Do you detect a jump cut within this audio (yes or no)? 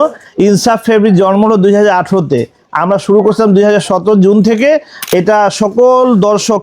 yes